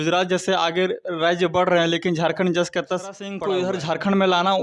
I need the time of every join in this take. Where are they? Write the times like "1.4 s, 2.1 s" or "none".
3.3 s